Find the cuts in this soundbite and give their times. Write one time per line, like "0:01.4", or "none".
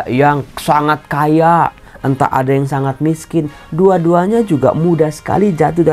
none